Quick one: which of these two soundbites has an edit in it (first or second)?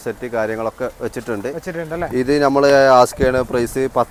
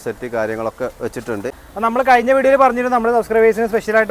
second